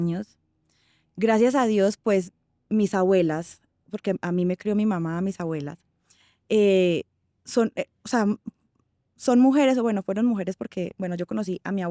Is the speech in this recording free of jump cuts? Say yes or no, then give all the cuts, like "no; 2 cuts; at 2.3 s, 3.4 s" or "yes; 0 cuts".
yes; 0 cuts